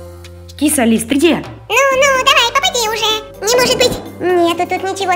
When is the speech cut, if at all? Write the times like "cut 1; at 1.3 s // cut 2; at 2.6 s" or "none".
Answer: cut 1; at 1.6 s // cut 2; at 3.2 s // cut 3; at 4.1 s